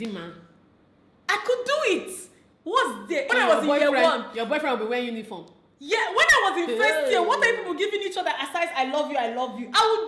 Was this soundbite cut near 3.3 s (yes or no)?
yes